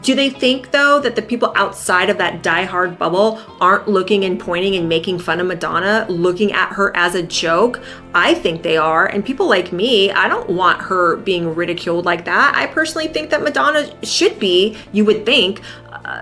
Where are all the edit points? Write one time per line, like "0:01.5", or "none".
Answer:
none